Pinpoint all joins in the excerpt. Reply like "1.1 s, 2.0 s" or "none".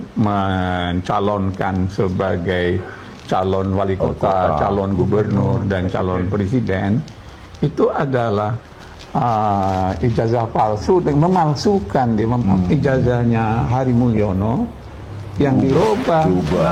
none